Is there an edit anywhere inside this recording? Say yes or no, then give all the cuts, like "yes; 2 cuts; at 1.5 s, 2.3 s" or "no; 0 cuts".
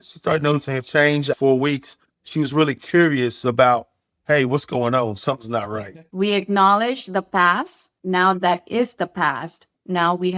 yes; 2 cuts; at 1.3 s, 6.1 s